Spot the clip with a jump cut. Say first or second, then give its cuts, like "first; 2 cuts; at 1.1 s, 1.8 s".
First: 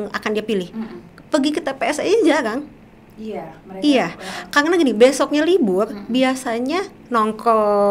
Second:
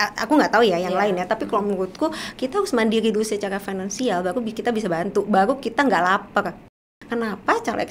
second; 1 cut; at 6.9 s